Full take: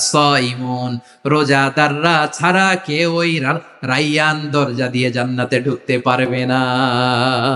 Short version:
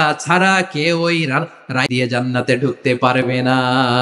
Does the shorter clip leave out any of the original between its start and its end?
yes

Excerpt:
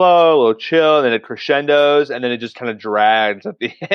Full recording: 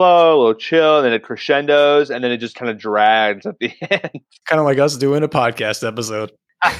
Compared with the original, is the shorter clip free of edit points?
yes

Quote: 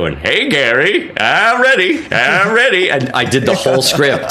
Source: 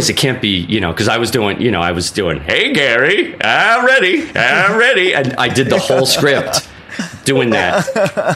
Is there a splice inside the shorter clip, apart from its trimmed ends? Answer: no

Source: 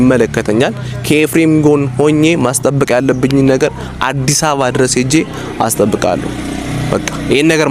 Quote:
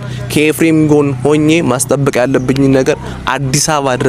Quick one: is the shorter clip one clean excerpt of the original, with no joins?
yes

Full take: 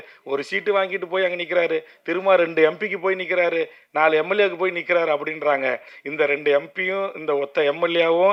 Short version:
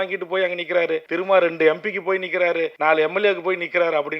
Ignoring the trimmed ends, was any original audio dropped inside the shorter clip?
yes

